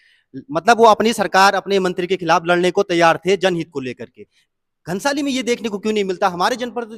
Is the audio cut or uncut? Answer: uncut